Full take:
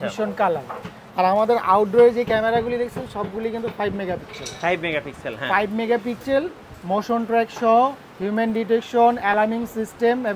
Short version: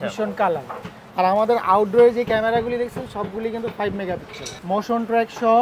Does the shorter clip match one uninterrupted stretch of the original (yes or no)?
no